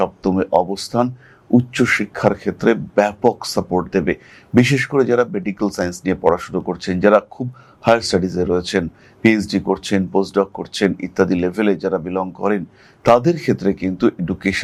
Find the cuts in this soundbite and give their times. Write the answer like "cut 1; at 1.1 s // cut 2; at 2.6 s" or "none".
none